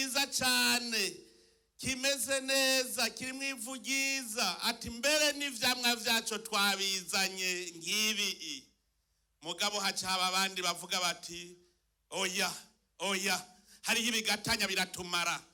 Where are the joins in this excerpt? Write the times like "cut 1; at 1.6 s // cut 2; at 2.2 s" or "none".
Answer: none